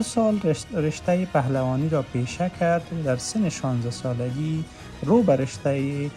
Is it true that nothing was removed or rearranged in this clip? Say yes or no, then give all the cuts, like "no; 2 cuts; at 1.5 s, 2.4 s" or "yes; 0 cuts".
yes; 0 cuts